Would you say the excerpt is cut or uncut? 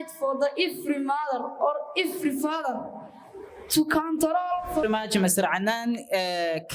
cut